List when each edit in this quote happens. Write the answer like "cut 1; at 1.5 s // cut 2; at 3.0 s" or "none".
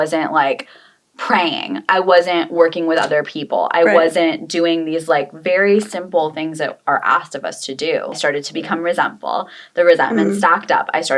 cut 1; at 8.2 s